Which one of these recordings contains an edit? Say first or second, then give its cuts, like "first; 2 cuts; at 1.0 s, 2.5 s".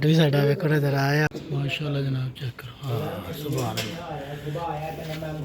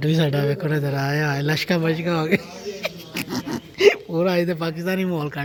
first; 1 cut; at 1.3 s